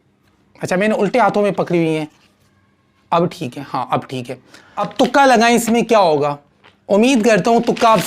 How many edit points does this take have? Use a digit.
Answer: 1